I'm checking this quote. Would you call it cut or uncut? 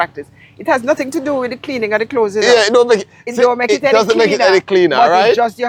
uncut